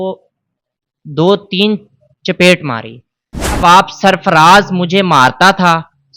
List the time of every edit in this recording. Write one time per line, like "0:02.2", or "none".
0:03.6